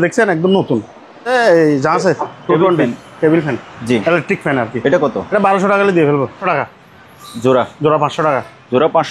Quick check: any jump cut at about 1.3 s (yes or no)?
yes